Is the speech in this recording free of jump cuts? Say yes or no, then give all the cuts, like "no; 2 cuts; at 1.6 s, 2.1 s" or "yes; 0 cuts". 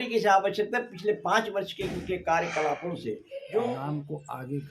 no; 1 cut; at 3.8 s